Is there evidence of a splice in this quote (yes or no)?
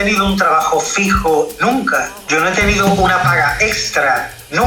no